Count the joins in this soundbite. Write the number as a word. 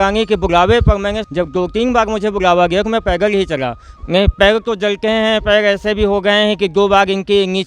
two